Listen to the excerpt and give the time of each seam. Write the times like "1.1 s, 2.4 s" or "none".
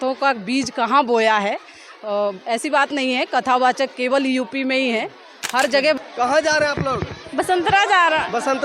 6.0 s